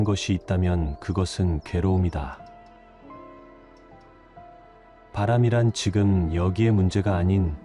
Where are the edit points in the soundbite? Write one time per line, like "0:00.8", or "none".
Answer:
none